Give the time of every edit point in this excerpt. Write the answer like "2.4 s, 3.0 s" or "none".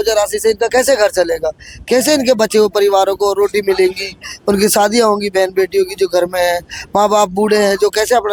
none